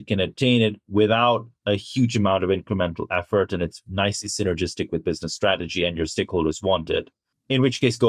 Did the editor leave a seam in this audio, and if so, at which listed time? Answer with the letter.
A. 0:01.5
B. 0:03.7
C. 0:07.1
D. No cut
D